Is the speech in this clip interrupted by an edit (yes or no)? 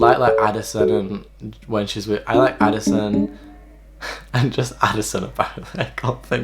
no